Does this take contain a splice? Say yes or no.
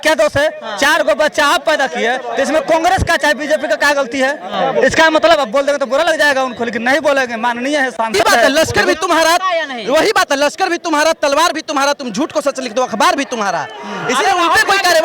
yes